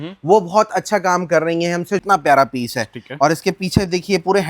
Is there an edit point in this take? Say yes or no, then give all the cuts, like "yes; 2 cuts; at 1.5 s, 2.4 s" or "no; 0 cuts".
yes; 1 cut; at 2.0 s